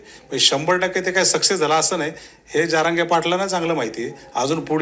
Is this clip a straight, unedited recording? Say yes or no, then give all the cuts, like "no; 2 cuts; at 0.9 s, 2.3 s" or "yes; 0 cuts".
yes; 0 cuts